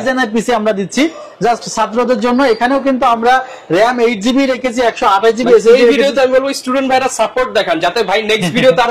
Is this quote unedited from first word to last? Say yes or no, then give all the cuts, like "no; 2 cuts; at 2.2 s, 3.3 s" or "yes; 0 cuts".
yes; 0 cuts